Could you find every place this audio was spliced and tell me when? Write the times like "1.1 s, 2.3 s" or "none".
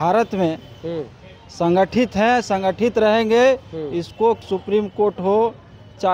4.4 s